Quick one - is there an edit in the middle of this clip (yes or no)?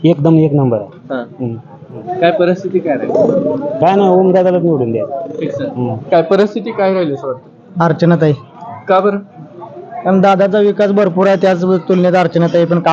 yes